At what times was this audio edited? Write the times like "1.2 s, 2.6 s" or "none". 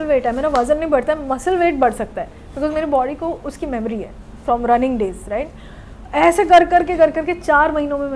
none